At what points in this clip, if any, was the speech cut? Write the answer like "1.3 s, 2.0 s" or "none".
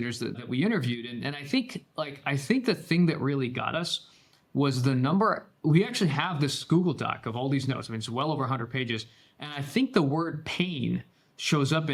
none